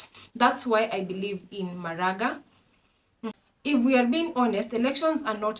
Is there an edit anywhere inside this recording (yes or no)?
yes